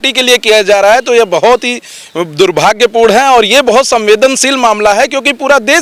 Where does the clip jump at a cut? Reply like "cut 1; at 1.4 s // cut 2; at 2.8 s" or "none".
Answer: none